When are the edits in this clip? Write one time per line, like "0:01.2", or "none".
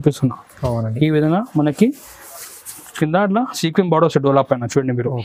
none